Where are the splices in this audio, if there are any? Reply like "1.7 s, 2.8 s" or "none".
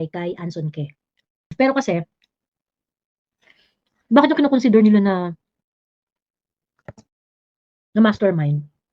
1.5 s